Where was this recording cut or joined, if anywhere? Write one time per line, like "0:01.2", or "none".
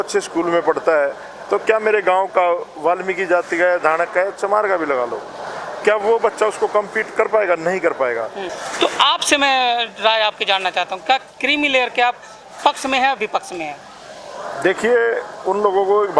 0:08.5

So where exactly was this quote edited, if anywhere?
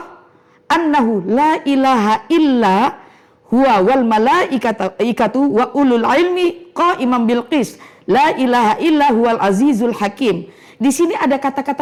none

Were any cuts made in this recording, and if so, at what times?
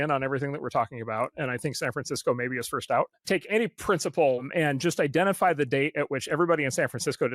0:03.2
0:04.4

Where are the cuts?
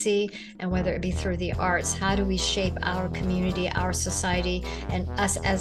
none

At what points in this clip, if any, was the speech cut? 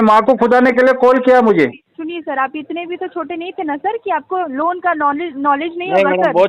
0:01.9

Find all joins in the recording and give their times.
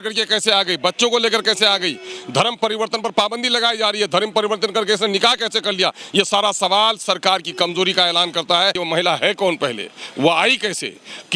0:08.8

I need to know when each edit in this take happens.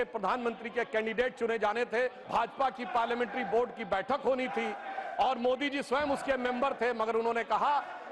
0:02.2

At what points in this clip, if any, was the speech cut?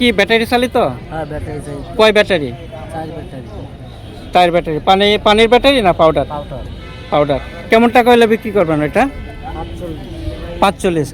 none

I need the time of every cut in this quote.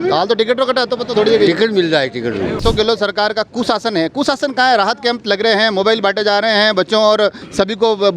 0:02.6

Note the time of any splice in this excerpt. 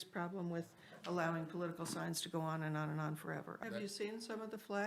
0:03.5

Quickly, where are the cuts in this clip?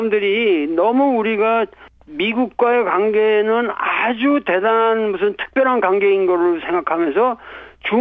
0:02.4

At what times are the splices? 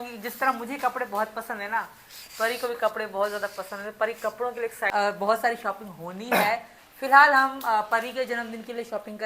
0:04.9

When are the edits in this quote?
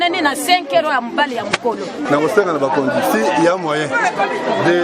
0:02.1

